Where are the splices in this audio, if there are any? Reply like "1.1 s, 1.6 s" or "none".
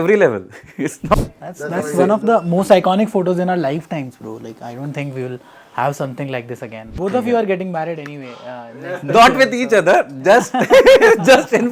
1.1 s, 6.9 s